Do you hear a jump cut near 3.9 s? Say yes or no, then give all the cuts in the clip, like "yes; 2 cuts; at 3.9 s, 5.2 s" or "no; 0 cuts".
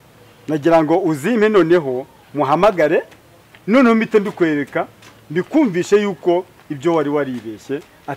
no; 0 cuts